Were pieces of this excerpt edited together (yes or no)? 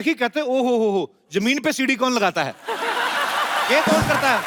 no